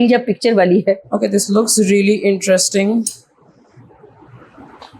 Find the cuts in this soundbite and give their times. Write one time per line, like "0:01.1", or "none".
0:01.0